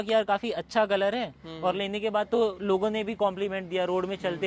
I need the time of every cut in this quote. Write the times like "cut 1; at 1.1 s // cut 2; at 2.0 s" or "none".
none